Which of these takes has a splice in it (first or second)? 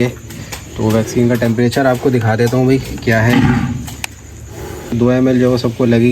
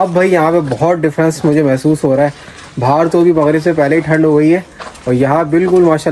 first